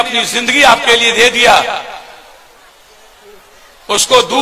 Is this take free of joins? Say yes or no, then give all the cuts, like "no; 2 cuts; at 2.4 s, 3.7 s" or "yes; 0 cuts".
yes; 0 cuts